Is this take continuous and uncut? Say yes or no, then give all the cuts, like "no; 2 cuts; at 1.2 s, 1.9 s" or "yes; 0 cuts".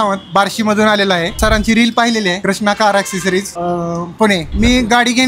no; 4 cuts; at 1.4 s, 2.4 s, 3.5 s, 4.5 s